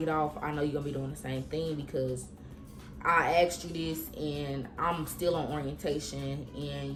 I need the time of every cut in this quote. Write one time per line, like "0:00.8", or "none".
none